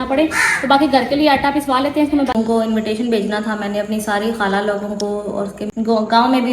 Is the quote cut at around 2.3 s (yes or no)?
yes